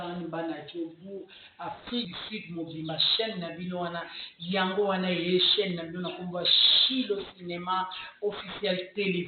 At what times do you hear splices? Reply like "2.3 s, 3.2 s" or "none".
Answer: 2.1 s